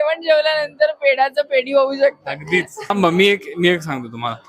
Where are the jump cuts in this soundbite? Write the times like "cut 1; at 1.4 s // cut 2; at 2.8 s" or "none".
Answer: cut 1; at 2.9 s